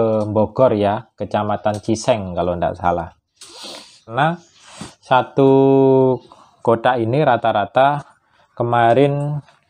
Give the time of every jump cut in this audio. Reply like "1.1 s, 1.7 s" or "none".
4.1 s